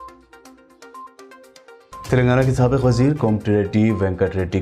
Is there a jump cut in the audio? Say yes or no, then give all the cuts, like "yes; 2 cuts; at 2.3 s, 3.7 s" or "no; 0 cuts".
yes; 1 cut; at 0.9 s